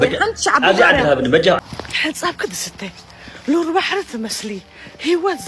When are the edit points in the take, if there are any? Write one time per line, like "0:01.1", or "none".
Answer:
0:01.6

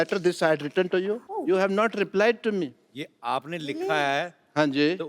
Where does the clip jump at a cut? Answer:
0:01.3

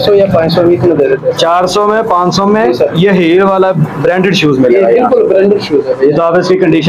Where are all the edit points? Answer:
none

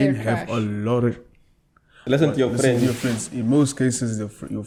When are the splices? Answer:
none

